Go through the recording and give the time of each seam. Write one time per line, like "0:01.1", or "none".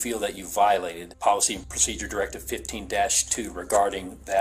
0:01.1